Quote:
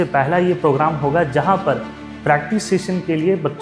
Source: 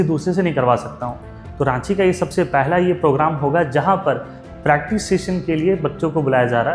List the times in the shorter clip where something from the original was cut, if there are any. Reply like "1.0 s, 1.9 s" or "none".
none